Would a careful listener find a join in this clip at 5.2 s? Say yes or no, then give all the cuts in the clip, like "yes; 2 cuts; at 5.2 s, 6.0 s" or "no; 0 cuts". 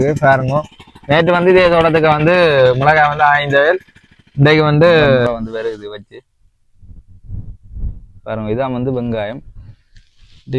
yes; 1 cut; at 5.2 s